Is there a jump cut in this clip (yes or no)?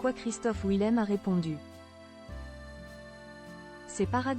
yes